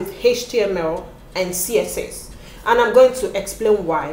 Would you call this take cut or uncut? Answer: uncut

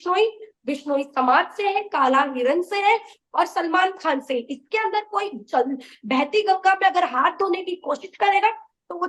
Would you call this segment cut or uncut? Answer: uncut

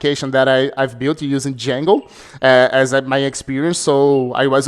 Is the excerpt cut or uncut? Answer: uncut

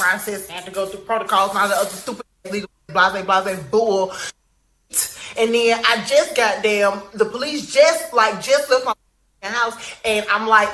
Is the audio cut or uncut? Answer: cut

